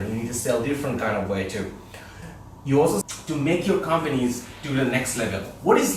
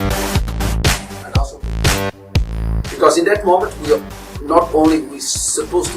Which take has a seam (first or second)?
first